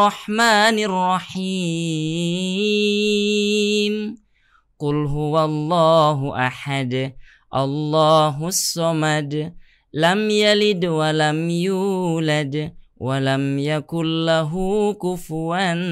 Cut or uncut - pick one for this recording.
uncut